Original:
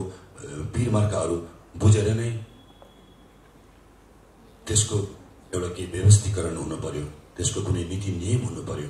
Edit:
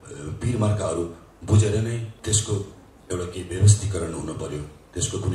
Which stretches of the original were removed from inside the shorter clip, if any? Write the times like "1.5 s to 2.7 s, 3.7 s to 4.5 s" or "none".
2.4 s to 4.5 s

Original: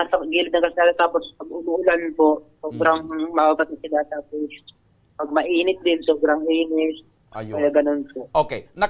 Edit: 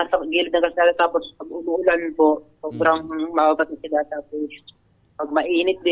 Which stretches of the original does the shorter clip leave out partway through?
none

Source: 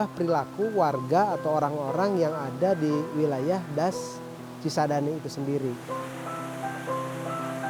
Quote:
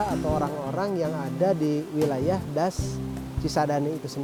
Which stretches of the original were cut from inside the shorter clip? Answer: none

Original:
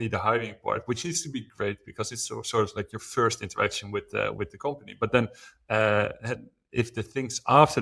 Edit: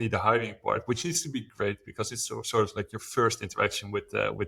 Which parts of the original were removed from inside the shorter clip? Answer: none

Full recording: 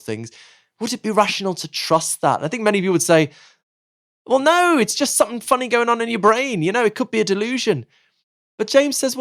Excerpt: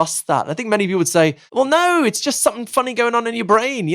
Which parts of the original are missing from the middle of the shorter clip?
3.4 s to 4.2 s

